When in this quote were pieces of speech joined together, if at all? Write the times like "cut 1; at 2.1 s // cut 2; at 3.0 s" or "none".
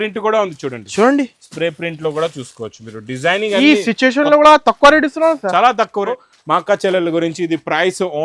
cut 1; at 6.1 s